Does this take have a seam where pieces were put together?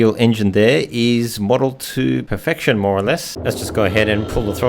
yes; 1 cut; at 3.3 s

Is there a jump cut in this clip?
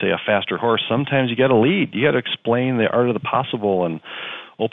no; 0 cuts

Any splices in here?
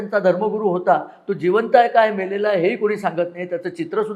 no; 0 cuts

